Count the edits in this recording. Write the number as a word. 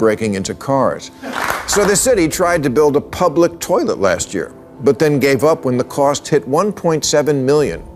one